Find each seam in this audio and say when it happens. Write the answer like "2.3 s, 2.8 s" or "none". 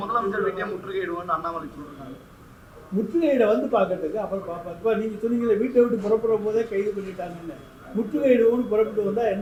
none